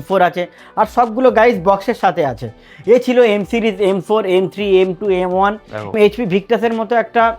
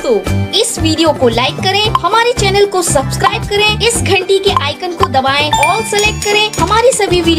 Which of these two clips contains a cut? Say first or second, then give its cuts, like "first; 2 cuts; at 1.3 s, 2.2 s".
first; 1 cut; at 5.9 s